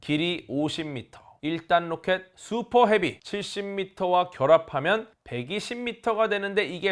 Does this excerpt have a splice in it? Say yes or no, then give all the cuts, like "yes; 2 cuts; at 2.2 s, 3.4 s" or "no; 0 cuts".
no; 0 cuts